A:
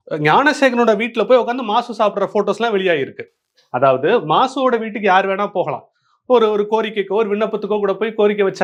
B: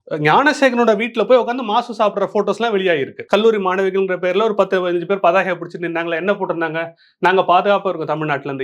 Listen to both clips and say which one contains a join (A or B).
B